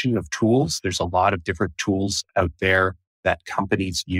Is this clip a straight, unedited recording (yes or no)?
yes